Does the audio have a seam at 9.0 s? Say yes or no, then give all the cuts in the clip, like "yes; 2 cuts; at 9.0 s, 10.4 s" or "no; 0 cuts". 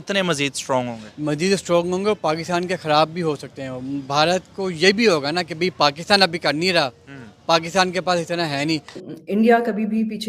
yes; 1 cut; at 9.0 s